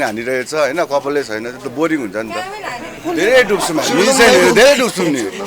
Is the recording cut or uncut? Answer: cut